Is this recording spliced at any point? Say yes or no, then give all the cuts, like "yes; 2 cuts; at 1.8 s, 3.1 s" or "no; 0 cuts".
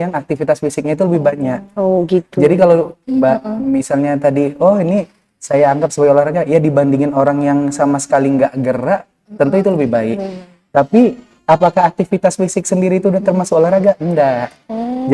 no; 0 cuts